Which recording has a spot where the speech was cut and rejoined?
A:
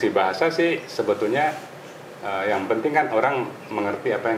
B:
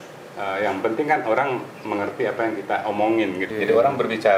B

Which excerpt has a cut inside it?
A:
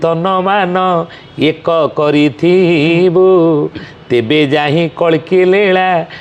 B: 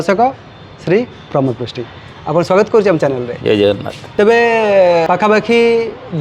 B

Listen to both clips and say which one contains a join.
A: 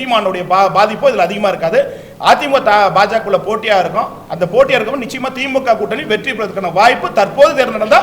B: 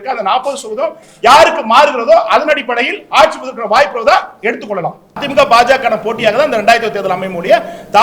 B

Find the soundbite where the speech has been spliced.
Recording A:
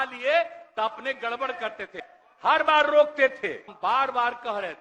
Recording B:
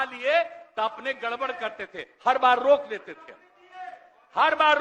A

